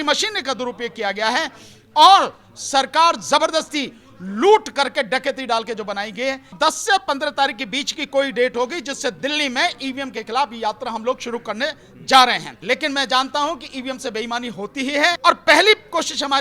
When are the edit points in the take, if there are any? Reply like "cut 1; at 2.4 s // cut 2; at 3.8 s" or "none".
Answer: cut 1; at 6.5 s // cut 2; at 12.5 s // cut 3; at 15.2 s